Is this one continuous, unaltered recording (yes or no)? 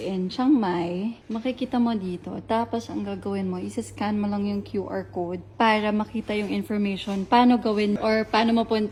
yes